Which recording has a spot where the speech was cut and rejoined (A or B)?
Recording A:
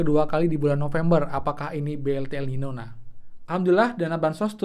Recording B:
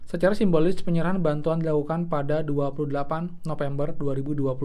A